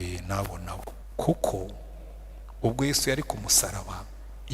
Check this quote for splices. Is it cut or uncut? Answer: cut